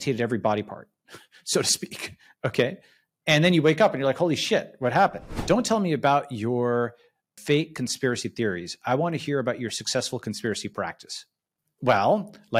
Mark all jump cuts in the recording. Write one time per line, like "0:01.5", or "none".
0:05.3
0:07.4